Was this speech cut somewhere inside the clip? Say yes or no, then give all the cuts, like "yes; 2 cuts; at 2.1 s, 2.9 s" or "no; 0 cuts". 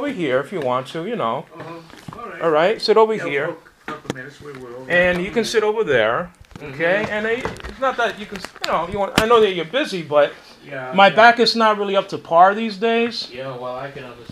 no; 0 cuts